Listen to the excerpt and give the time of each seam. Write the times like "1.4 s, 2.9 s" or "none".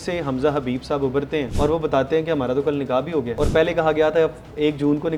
1.5 s, 3.3 s